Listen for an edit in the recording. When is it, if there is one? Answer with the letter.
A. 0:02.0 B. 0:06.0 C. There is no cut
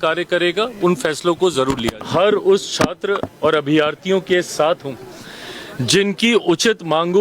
A